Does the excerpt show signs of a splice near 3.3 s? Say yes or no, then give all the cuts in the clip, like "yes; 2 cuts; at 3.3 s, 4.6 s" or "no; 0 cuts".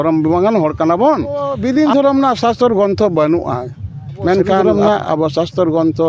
no; 2 cuts; at 1.5 s, 4.7 s